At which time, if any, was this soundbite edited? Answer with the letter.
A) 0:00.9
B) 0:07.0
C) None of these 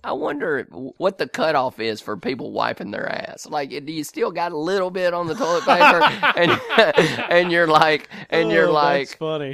A